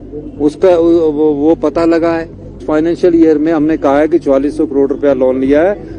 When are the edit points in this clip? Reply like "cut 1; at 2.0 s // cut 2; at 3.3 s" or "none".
cut 1; at 2.6 s